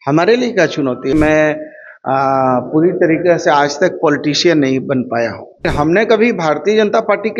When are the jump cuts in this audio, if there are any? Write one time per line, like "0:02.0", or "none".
0:01.1
0:05.7